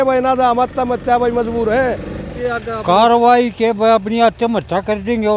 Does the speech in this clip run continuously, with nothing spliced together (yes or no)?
no